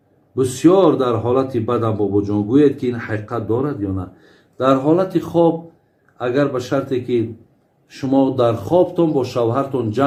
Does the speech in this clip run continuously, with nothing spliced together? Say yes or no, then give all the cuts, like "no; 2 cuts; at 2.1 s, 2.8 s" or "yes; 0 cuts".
yes; 0 cuts